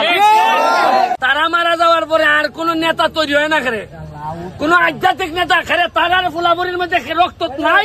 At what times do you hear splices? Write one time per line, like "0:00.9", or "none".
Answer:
0:01.2